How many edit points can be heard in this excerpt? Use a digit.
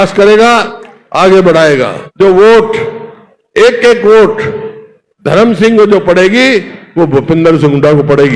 1